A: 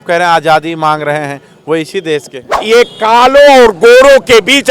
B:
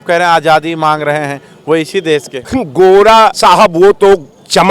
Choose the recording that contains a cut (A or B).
A